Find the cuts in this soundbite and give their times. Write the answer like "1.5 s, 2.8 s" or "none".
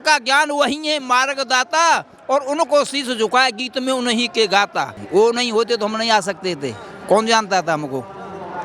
5.0 s